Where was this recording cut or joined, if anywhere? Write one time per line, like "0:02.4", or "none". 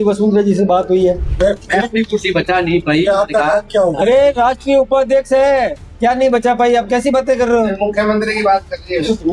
0:01.3